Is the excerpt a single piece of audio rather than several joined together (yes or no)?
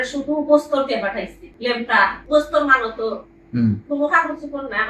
no